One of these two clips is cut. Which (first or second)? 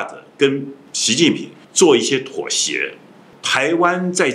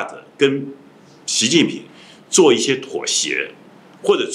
first